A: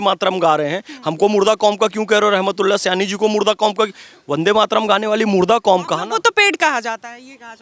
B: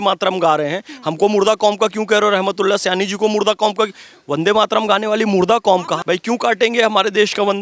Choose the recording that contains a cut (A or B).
B